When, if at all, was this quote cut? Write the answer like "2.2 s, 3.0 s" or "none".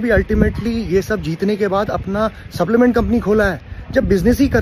none